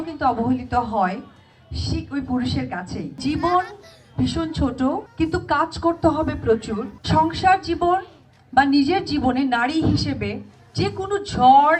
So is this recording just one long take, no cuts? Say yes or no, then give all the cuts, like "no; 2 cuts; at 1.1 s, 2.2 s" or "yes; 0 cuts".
no; 2 cuts; at 3.2 s, 6.9 s